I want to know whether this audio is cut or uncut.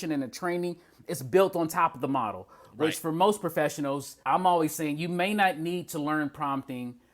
cut